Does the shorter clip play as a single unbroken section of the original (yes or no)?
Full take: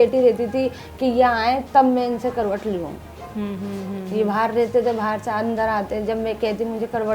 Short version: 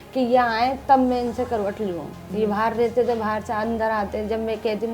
no